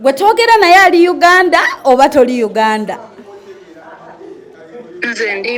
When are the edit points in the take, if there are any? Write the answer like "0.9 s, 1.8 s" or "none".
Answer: none